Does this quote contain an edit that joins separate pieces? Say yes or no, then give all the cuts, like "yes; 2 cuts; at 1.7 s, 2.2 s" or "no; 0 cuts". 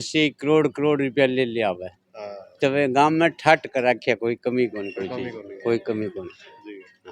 no; 0 cuts